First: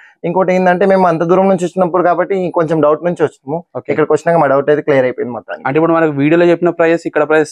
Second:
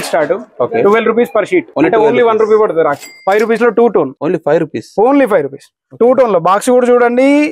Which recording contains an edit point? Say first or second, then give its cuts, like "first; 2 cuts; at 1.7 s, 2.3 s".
second; 3 cuts; at 1.7 s, 3.1 s, 4.2 s